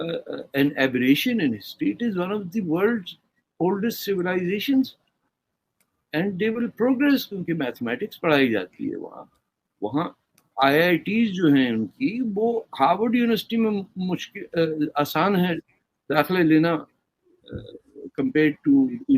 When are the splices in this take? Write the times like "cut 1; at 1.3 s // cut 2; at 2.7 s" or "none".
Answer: none